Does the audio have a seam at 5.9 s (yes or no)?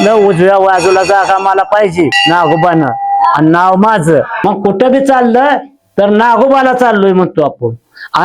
no